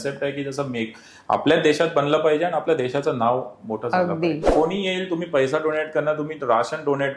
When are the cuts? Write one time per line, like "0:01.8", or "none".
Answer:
0:04.5